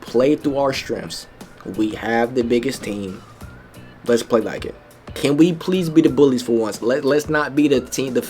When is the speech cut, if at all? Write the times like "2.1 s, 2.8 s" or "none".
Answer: 5.1 s